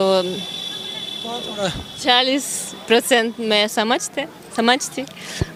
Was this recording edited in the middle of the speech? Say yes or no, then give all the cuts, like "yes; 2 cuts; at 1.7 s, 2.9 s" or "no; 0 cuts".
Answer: no; 0 cuts